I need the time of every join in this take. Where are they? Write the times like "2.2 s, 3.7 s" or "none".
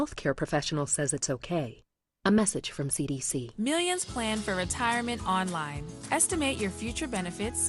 3.4 s